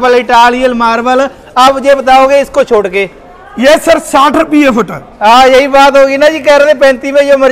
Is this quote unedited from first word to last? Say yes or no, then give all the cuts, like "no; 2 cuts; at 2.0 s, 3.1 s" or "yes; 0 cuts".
yes; 0 cuts